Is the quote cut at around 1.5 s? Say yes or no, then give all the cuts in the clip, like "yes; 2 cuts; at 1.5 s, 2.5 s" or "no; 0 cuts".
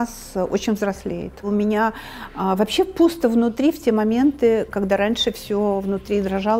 yes; 1 cut; at 1.5 s